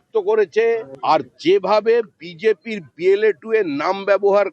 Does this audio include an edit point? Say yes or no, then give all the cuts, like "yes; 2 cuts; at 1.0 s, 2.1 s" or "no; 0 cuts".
no; 0 cuts